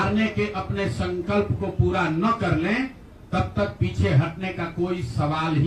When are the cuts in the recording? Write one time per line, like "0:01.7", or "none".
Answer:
none